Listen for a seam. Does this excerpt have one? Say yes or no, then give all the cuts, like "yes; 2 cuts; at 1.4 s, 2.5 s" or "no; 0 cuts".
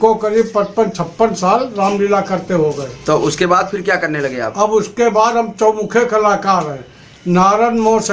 no; 0 cuts